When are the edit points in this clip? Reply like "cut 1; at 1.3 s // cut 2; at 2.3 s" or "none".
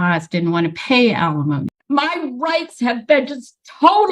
cut 1; at 1.7 s